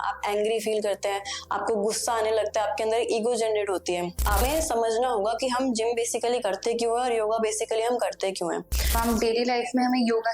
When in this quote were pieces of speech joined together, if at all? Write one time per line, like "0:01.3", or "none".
0:04.4
0:08.9

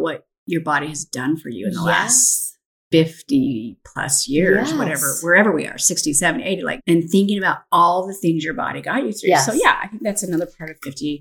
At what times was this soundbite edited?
0:06.7

